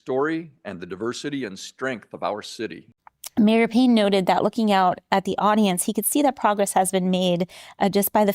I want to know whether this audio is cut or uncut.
cut